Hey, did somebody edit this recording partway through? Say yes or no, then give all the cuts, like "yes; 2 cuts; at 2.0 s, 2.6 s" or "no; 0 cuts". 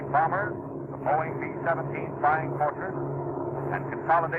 yes; 1 cut; at 0.9 s